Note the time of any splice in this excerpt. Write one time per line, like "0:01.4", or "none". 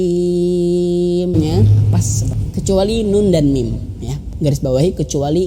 0:01.3

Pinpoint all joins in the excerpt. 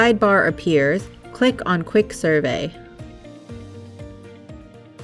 0:03.1

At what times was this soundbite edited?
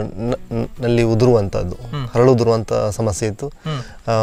none

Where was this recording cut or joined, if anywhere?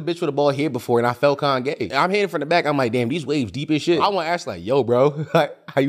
0:01.9
0:04.0

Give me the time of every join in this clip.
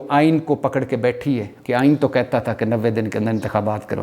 0:01.5

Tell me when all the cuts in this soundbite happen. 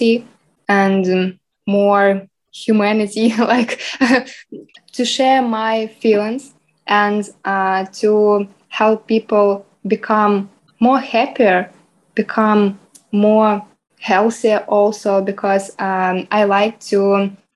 none

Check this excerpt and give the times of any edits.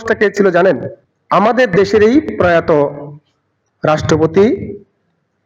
none

